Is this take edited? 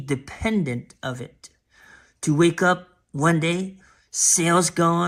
no; 0 cuts

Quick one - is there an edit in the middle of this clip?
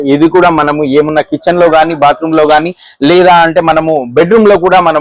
no; 0 cuts

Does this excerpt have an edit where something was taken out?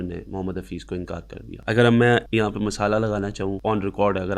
yes; 3 cuts; at 1.5 s, 2.3 s, 3.6 s

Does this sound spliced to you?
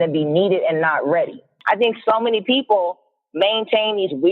yes; 1 cut; at 1.5 s

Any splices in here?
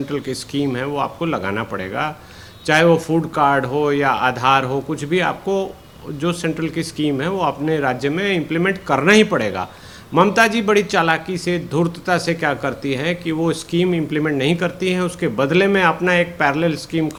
no; 0 cuts

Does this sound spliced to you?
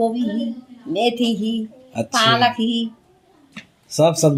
no; 0 cuts

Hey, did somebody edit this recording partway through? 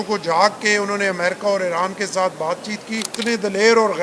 yes; 1 cut; at 3.1 s

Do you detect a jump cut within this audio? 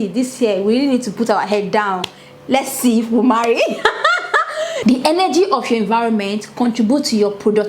yes; 1 cut; at 4.8 s

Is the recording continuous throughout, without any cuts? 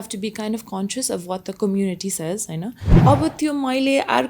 no; 1 cut; at 2.8 s

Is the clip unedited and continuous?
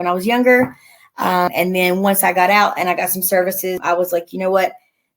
no; 2 cuts; at 1.5 s, 3.8 s

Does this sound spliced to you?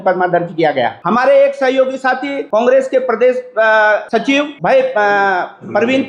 yes; 3 cuts; at 1.0 s, 2.3 s, 4.2 s

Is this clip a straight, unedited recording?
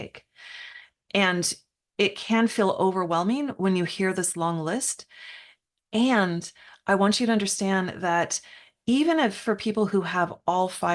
yes; 0 cuts

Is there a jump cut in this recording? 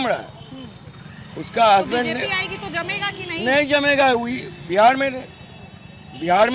no; 0 cuts

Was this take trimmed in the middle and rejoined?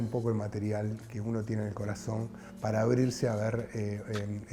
no; 0 cuts

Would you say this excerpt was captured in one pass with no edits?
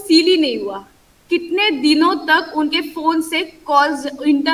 yes; 0 cuts

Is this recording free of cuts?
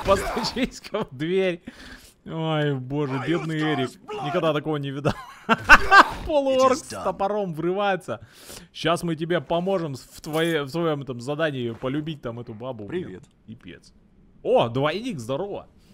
yes; 0 cuts

